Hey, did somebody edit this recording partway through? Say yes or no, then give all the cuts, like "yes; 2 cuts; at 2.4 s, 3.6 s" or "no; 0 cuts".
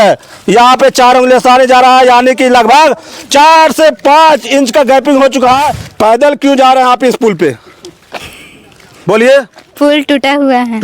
yes; 1 cut; at 5.8 s